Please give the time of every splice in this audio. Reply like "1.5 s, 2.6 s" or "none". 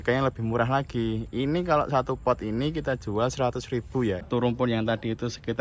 4.3 s